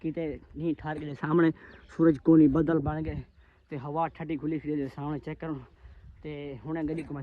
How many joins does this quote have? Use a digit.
0